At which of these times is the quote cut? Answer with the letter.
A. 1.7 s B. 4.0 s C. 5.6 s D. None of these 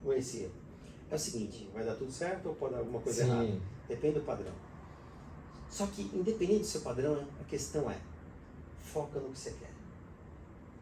A